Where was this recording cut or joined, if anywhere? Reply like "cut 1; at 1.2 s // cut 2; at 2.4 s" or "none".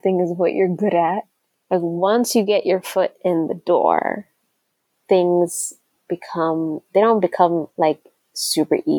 cut 1; at 1.7 s // cut 2; at 7.7 s